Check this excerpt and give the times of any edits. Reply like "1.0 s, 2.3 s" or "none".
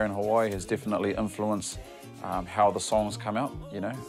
none